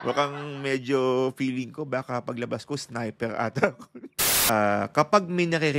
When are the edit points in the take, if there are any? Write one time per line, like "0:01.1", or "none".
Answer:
0:03.9